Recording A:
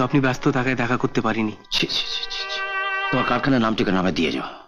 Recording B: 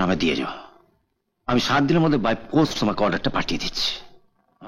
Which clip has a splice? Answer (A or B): A